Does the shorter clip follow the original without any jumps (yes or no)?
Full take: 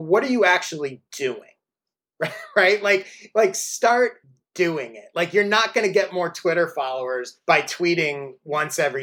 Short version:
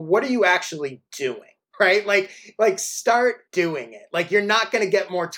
no